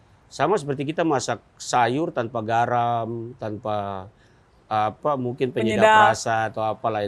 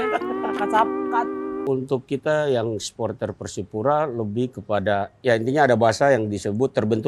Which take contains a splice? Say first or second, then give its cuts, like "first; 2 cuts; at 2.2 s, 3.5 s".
second; 1 cut; at 1.7 s